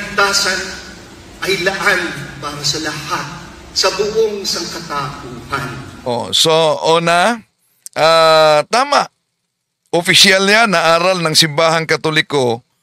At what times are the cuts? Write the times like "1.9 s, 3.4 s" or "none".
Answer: none